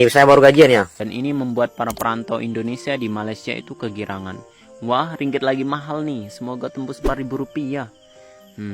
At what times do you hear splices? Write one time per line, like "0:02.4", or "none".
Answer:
0:00.9